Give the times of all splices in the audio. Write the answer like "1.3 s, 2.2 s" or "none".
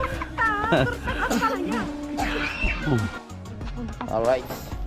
none